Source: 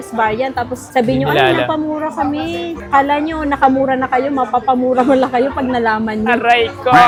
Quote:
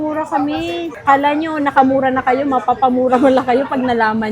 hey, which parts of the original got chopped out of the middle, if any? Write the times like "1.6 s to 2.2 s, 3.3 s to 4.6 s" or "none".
none